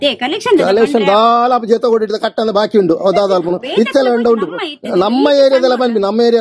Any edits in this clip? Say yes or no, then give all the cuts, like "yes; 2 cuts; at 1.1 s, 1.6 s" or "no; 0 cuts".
no; 0 cuts